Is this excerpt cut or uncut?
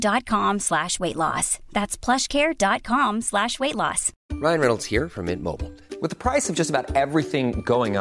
cut